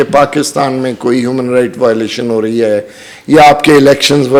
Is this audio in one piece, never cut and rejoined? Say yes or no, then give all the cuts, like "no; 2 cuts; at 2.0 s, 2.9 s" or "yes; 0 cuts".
yes; 0 cuts